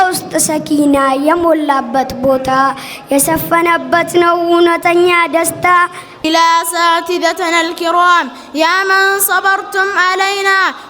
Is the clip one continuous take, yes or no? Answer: no